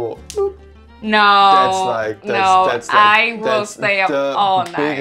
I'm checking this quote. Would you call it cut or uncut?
uncut